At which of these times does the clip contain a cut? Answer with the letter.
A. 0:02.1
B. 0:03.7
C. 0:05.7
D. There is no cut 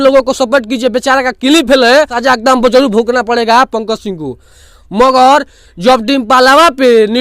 A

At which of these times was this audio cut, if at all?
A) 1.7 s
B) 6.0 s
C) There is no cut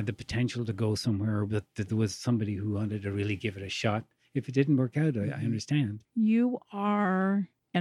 B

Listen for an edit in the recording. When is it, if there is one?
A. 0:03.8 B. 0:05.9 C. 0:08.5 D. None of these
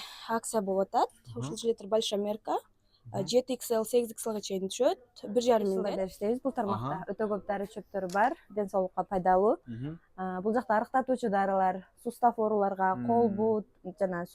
B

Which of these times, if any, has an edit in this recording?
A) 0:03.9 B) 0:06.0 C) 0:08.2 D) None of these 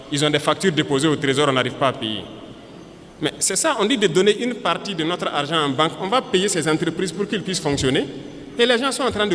D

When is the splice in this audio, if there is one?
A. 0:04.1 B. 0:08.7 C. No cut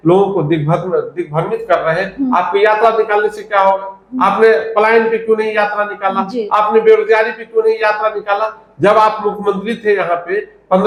C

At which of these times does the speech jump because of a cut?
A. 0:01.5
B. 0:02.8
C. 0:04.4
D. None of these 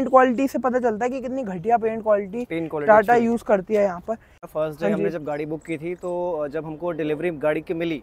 C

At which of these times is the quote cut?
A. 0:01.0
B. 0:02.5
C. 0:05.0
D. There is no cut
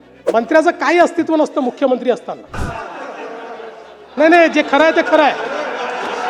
B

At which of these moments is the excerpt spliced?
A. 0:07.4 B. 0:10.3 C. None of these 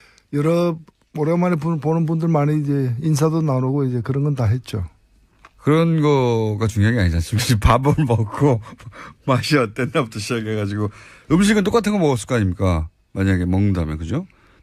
B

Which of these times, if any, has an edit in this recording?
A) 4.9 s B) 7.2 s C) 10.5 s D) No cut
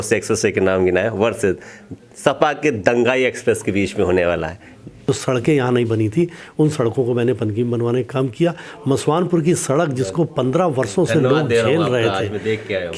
A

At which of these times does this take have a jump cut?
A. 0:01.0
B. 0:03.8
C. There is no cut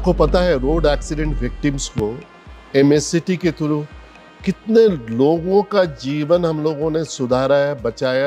C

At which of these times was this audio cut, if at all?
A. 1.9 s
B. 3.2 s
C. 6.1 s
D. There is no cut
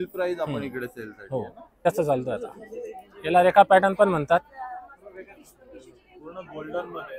A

